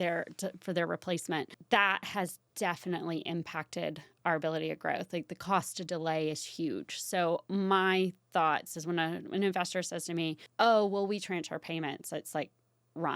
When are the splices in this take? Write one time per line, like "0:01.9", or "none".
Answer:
0:01.6
0:10.4